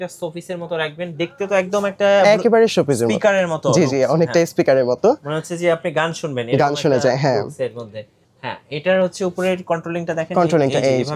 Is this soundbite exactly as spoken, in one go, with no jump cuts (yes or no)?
yes